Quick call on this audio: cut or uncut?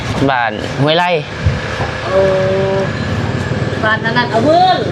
uncut